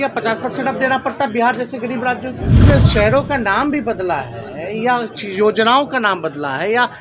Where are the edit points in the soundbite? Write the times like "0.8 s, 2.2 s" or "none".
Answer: 2.7 s